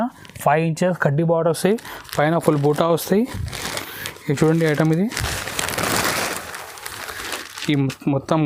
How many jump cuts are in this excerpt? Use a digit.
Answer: 0